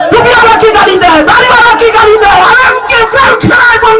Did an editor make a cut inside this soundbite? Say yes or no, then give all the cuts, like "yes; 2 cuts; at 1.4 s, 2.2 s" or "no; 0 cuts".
no; 0 cuts